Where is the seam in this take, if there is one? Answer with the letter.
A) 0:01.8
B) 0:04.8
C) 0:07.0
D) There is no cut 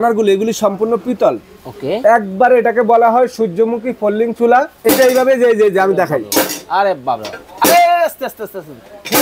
B